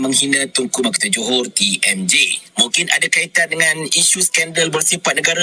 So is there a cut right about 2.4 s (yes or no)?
yes